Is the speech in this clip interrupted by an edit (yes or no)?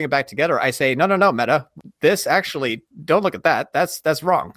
yes